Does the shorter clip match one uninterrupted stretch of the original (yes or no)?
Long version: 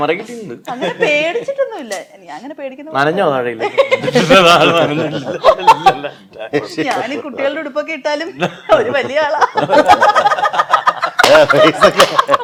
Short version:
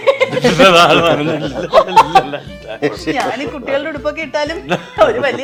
yes